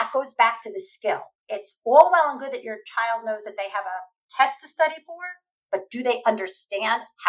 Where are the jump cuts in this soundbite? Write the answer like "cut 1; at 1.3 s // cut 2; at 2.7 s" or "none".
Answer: cut 1; at 1.3 s